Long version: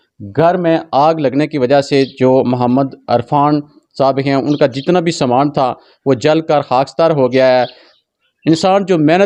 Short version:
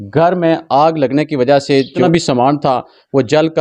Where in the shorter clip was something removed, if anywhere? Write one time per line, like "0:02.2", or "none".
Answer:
0:02.0